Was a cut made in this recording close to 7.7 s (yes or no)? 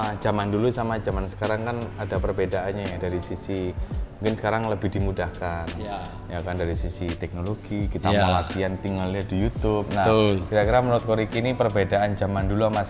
no